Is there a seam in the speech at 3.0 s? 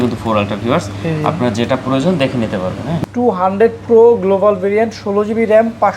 yes; 1 cut; at 3.0 s

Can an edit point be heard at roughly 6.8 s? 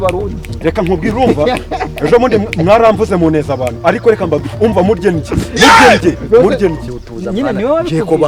yes; 1 cut; at 6.8 s

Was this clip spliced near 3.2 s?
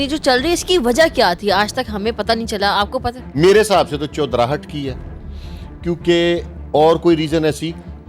yes; 1 cut; at 3.2 s

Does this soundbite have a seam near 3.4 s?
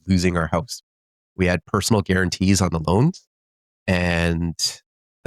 yes; 1 cut; at 3.4 s

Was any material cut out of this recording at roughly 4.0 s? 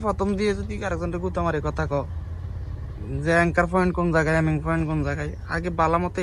no; 0 cuts

